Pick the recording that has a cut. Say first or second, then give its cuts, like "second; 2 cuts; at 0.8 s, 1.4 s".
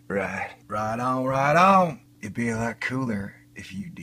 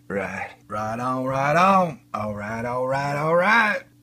first; 1 cut; at 2.1 s